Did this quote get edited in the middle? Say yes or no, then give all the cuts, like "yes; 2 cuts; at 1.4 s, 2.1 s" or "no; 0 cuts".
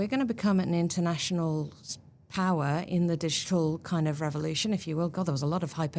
no; 0 cuts